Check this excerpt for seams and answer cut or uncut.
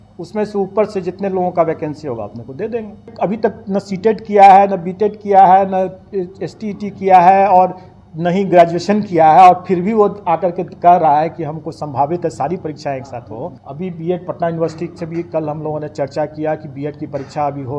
cut